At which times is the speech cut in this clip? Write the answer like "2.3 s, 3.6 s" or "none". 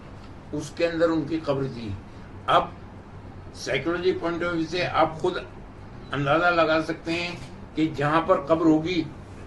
none